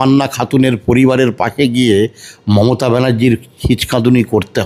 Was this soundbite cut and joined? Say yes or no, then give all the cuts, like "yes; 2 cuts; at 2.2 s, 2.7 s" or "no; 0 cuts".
no; 0 cuts